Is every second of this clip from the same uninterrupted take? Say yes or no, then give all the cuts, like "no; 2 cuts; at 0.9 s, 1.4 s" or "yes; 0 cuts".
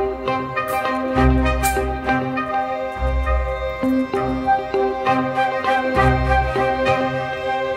no; 1 cut; at 3.7 s